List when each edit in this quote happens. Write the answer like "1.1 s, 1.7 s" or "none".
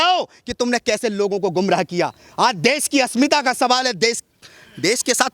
none